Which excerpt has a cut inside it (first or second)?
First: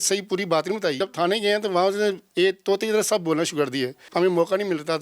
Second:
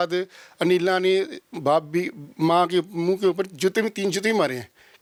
first